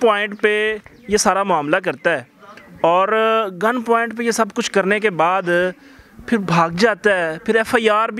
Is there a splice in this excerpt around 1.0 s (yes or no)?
no